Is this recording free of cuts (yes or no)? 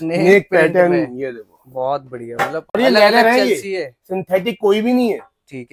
yes